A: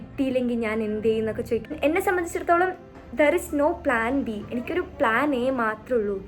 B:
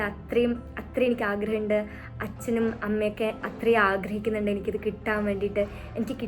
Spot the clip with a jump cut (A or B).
A